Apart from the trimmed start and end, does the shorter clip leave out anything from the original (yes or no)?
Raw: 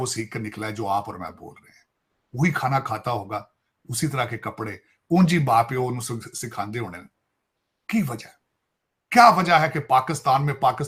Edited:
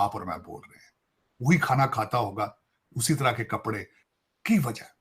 yes